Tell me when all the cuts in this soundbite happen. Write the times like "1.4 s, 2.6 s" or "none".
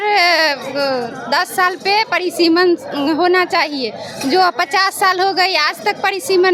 none